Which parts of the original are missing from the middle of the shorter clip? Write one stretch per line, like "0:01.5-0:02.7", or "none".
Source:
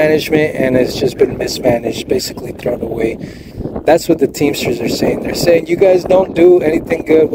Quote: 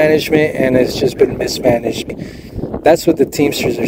0:02.1-0:03.1